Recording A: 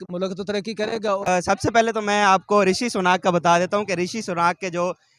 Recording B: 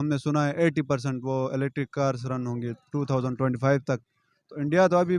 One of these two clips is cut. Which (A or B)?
A